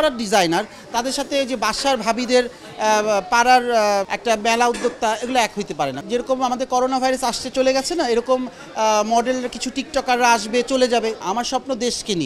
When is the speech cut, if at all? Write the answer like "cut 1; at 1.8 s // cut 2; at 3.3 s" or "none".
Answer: cut 1; at 4.1 s // cut 2; at 6.0 s // cut 3; at 11.2 s